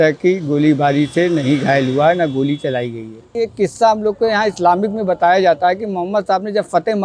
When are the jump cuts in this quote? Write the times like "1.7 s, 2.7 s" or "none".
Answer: 3.3 s